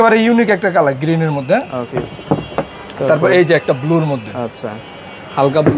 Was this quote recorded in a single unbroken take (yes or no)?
yes